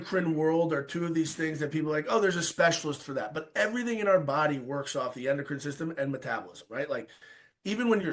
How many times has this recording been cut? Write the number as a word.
zero